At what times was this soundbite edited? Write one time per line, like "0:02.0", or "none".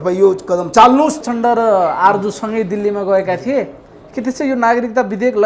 0:01.3